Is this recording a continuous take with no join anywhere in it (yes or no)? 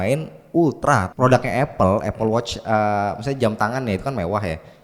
no